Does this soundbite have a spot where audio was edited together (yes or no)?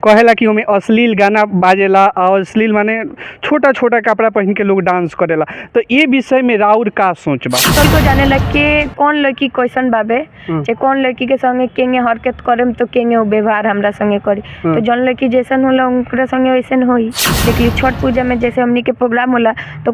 yes